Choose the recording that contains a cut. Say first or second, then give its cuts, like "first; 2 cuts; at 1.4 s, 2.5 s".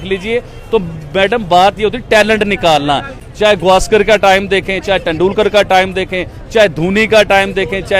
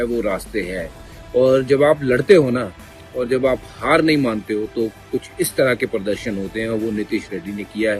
first; 1 cut; at 3.2 s